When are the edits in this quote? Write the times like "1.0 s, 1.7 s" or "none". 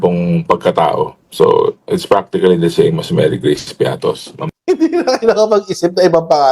4.5 s